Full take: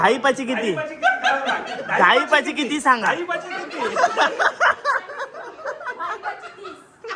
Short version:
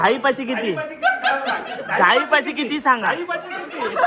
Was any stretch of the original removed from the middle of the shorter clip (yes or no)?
no